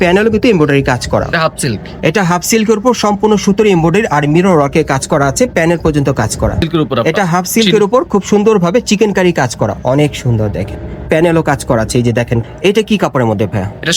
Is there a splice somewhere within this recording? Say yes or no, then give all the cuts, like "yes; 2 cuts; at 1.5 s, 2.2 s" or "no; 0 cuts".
yes; 3 cuts; at 1.3 s, 6.7 s, 12.4 s